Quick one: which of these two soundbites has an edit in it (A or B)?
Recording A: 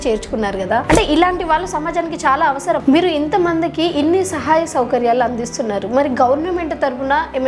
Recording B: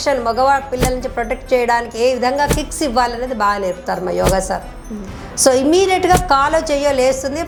A